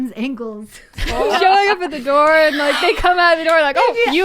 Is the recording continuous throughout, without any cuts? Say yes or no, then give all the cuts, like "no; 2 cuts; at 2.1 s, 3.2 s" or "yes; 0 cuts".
no; 1 cut; at 1.3 s